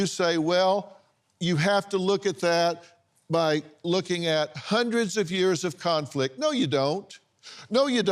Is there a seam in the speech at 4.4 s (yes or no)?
no